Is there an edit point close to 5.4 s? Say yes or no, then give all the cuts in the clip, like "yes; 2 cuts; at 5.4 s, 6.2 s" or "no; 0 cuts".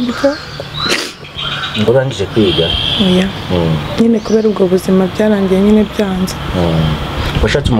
no; 1 cut; at 1.9 s